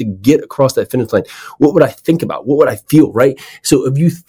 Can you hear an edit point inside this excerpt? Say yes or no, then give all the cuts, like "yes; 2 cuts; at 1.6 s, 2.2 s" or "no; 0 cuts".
no; 0 cuts